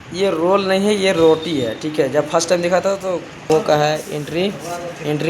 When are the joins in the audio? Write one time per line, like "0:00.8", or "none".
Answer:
0:03.5